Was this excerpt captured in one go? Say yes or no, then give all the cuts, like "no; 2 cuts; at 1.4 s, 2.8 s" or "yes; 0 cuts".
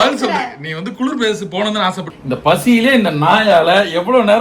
no; 1 cut; at 2.1 s